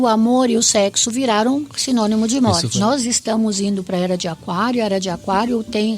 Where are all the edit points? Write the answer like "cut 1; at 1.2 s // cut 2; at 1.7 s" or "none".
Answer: cut 1; at 2.7 s